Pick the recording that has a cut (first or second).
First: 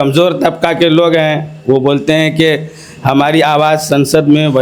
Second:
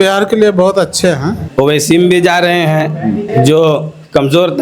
second